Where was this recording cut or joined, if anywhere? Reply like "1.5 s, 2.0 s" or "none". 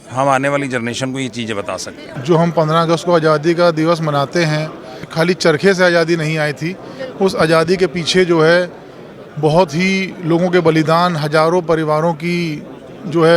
2.1 s, 5.1 s